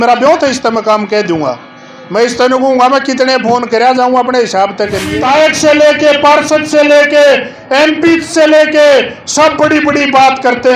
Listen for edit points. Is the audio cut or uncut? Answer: cut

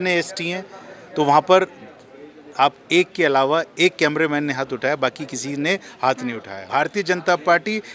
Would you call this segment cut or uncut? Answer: cut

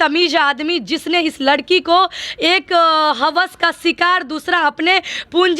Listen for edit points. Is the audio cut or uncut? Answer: uncut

